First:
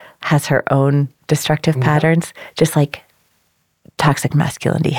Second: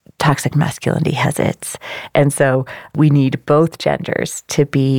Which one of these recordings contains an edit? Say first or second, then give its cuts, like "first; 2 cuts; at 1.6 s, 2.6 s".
second; 1 cut; at 2.9 s